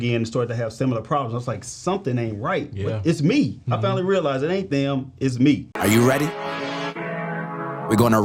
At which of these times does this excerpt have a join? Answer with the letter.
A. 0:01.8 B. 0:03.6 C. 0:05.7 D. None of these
C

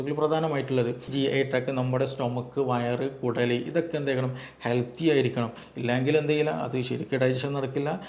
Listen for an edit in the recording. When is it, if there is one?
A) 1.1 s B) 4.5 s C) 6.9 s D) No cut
A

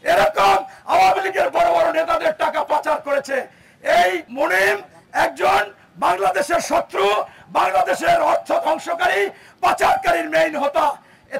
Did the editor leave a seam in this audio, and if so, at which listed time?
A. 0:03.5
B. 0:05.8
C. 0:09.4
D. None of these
D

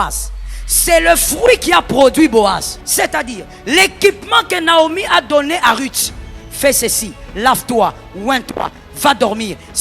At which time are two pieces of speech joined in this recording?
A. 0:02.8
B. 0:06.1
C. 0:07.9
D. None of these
A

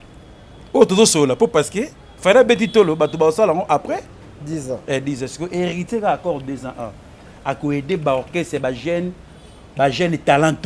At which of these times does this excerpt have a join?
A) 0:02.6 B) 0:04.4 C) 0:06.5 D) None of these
D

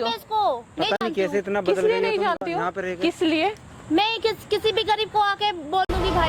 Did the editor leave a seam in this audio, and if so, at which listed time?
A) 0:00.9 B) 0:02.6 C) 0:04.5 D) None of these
D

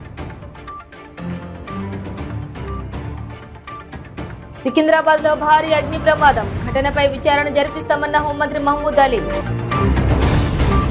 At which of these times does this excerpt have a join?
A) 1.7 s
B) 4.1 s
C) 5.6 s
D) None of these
A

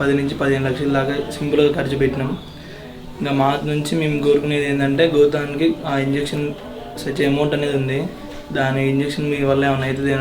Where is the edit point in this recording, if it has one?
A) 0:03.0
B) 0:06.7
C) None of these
C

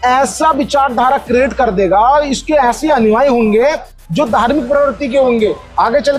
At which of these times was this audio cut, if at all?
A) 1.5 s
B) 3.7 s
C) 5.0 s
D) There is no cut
D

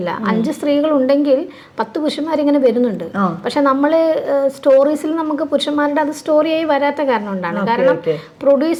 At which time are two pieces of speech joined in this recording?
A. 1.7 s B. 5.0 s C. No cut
C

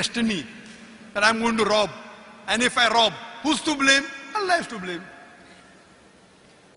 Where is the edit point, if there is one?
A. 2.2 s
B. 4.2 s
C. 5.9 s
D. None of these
C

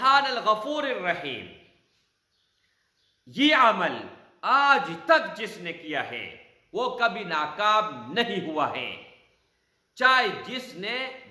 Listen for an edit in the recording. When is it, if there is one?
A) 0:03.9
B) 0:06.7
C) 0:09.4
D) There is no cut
D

